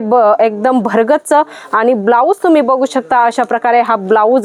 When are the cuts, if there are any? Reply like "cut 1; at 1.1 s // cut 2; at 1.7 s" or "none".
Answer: none